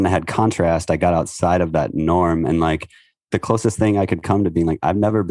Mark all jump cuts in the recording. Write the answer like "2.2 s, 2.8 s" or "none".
3.3 s